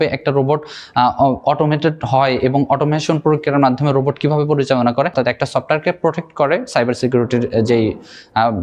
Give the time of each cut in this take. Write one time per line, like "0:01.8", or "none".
0:05.1

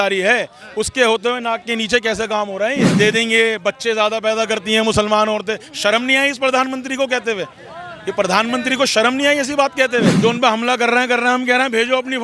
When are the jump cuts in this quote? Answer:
0:02.9
0:10.1

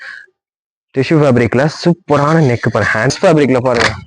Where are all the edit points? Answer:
0:03.1

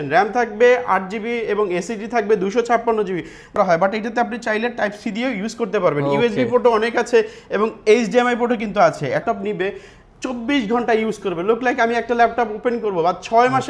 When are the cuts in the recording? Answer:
0:03.6
0:09.2

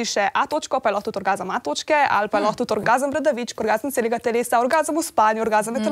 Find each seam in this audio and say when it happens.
0:02.8

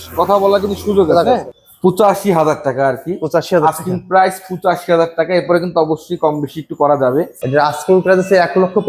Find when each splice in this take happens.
0:01.6
0:07.4

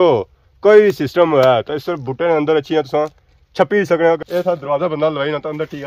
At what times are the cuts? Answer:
0:04.2

